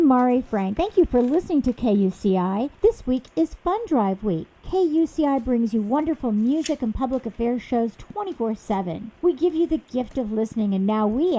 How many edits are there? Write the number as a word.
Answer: one